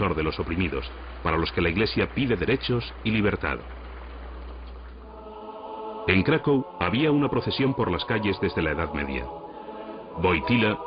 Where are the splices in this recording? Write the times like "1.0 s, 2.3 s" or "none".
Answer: 9.9 s